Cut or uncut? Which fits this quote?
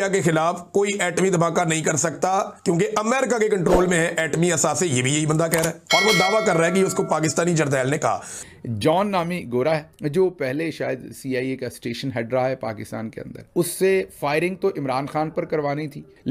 uncut